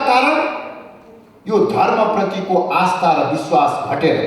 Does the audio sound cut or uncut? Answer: uncut